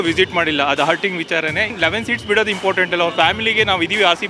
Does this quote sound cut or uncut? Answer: cut